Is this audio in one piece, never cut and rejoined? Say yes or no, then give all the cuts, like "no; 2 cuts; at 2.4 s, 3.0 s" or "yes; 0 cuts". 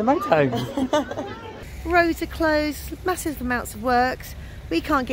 no; 1 cut; at 1.5 s